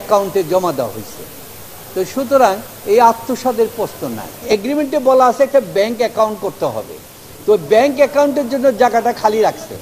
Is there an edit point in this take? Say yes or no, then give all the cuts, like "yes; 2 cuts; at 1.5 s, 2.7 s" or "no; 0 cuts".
yes; 1 cut; at 4.4 s